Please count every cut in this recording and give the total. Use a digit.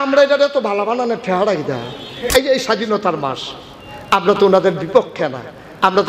1